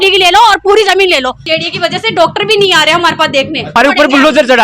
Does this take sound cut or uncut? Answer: cut